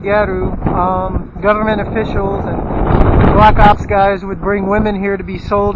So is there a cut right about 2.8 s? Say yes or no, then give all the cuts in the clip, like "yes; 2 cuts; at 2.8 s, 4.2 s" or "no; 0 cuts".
no; 1 cut; at 1.5 s